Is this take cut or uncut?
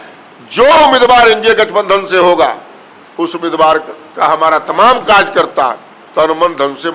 uncut